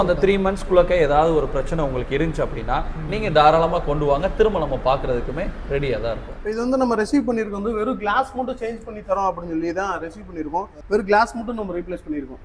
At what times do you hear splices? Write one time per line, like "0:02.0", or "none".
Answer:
0:06.3
0:10.8